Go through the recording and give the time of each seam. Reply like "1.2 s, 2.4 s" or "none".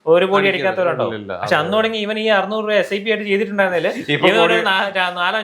none